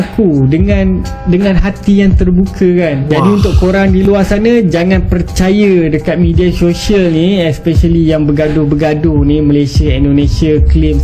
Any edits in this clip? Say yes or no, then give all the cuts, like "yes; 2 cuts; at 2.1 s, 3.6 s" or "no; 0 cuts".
no; 0 cuts